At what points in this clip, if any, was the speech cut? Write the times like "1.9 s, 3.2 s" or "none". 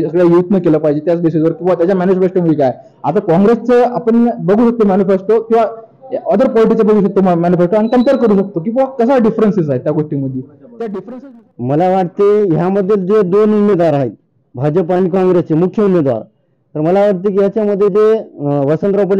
11.0 s